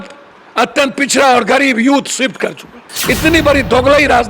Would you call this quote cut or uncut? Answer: cut